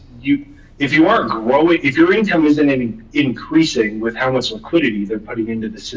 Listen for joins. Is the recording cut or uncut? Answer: uncut